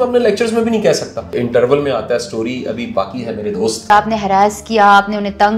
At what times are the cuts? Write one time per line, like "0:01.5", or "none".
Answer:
0:01.3
0:03.9